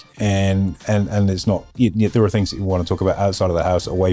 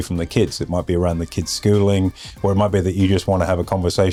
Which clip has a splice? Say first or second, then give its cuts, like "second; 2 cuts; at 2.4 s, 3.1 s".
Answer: first; 1 cut; at 1.7 s